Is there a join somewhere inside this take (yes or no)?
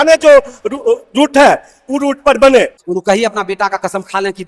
yes